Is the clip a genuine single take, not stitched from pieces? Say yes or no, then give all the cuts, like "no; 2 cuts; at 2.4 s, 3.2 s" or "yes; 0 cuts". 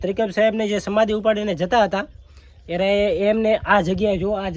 yes; 0 cuts